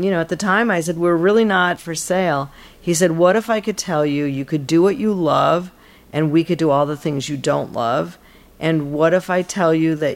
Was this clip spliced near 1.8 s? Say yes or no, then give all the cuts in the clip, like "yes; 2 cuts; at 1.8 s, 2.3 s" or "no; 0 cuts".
yes; 1 cut; at 1.8 s